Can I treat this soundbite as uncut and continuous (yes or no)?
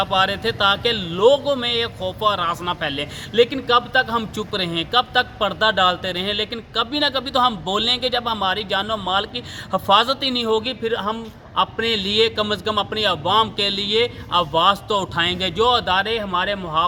yes